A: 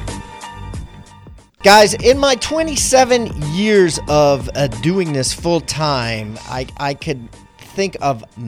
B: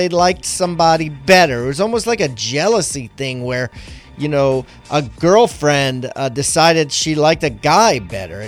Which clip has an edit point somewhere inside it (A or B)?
A